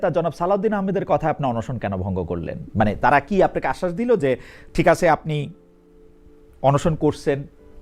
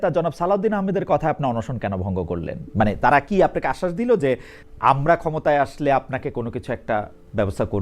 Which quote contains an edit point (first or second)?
second